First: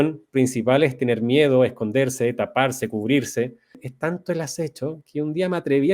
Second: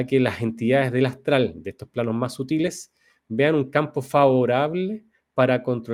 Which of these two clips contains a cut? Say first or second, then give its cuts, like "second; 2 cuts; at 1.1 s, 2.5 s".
first; 1 cut; at 3.9 s